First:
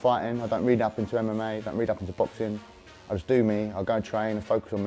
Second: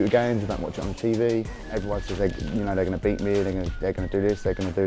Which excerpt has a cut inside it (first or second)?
second